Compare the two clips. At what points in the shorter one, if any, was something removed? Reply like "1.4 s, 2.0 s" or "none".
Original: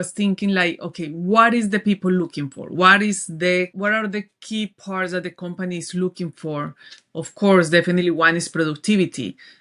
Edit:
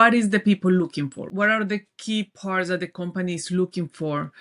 1.3 s